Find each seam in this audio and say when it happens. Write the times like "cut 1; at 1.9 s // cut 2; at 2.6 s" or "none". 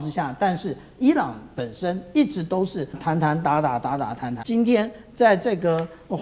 cut 1; at 3.0 s // cut 2; at 4.3 s